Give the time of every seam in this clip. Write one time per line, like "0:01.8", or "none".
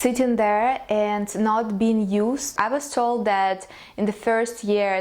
0:02.5